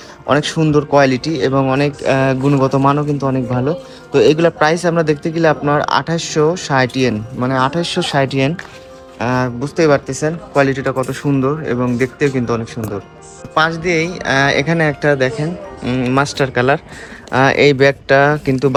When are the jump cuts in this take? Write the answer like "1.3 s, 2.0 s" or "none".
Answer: none